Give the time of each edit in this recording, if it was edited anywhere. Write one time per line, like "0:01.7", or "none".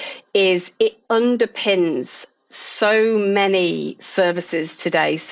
none